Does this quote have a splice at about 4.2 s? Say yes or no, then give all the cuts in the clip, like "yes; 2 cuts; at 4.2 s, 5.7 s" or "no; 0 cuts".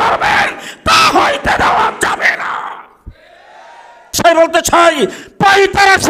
yes; 1 cut; at 4.2 s